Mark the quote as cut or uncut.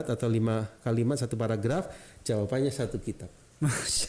uncut